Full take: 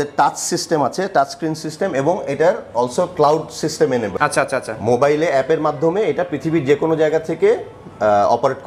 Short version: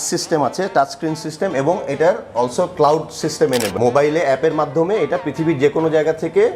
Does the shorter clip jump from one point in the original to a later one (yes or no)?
yes